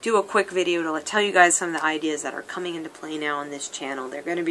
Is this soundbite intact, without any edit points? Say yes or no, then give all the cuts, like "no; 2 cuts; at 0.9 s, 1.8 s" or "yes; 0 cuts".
yes; 0 cuts